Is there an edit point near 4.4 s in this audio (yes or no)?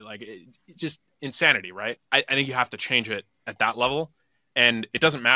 no